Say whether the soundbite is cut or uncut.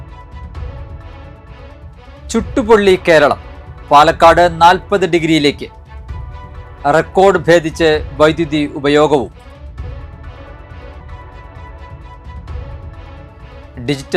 cut